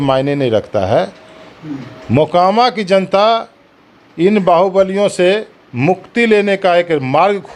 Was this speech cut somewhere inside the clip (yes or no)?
no